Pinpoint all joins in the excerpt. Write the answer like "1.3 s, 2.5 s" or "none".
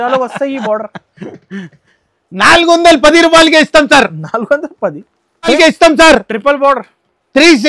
5.5 s